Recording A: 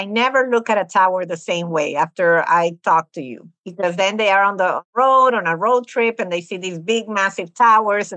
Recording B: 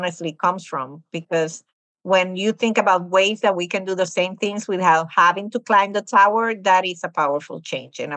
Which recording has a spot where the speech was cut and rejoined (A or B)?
A